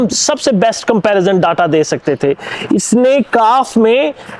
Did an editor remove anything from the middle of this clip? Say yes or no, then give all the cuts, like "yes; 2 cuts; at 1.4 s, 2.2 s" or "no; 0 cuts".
no; 0 cuts